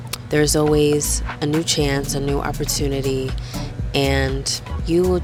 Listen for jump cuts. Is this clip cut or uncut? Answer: uncut